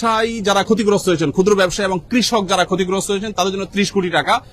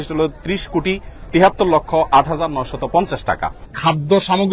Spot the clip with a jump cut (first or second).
second